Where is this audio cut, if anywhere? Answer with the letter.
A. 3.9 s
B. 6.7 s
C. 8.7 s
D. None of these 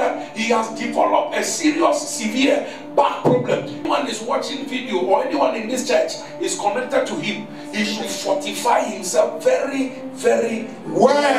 A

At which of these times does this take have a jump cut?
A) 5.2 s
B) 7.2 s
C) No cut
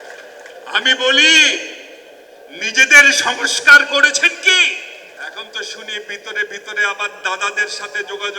A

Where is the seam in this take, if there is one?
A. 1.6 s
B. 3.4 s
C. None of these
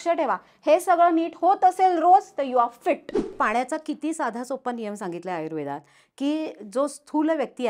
B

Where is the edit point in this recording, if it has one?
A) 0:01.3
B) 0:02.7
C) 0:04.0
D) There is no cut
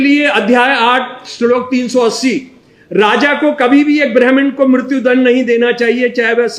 D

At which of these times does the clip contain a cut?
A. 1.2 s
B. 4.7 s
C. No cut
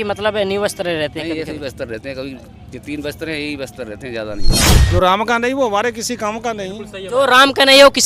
B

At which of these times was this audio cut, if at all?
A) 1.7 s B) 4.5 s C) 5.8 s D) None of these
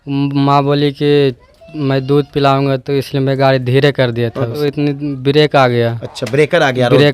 B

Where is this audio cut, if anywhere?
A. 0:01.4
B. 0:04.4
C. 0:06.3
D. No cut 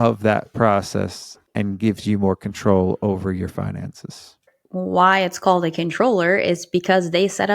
B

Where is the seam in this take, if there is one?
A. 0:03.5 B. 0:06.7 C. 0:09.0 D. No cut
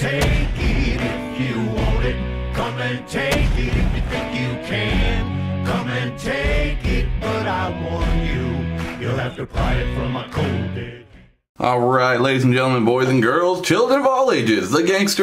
D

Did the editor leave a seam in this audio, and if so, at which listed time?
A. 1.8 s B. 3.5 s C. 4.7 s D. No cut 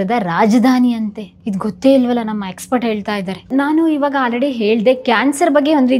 B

